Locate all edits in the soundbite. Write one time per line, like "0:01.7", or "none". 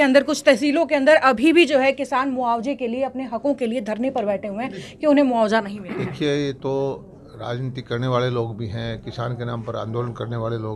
none